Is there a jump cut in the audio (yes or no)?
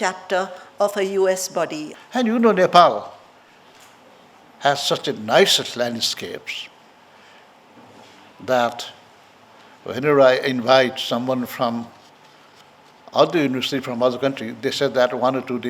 yes